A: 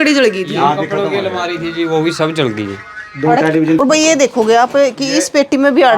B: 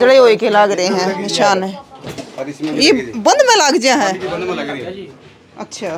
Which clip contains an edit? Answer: A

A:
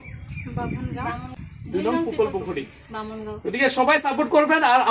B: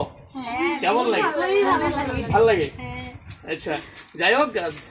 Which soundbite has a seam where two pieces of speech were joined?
A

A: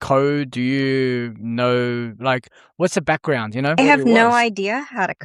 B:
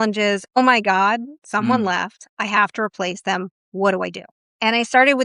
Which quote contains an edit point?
A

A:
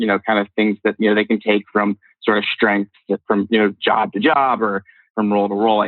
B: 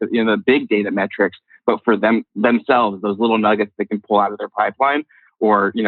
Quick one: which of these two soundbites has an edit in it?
A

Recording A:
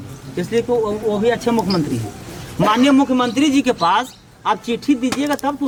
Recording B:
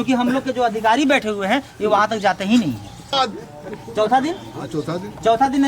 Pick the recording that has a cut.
B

